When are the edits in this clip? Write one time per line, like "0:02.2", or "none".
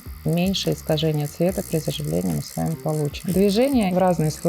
0:03.2